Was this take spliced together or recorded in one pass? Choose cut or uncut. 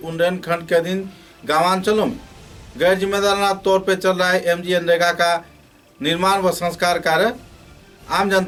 uncut